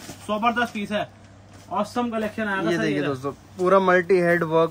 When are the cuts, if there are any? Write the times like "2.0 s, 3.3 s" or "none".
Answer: none